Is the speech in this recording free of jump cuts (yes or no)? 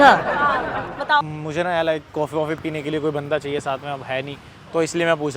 no